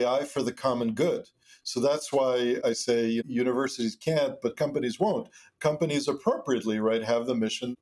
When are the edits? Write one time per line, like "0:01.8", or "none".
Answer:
none